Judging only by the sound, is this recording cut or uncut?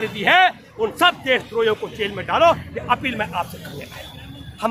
uncut